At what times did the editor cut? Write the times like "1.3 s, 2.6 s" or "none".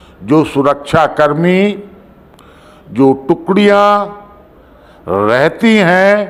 none

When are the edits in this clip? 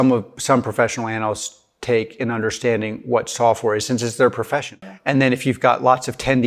4.8 s

